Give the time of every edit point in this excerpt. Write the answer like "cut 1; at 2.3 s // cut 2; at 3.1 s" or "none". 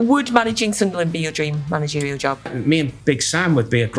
cut 1; at 2.5 s